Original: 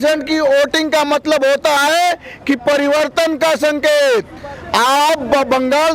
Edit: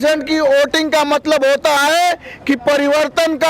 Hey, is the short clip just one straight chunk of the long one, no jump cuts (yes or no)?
yes